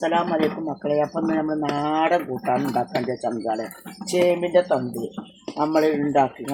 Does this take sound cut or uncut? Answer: uncut